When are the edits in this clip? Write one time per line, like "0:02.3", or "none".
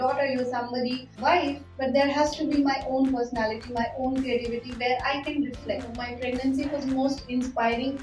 0:01.1
0:06.0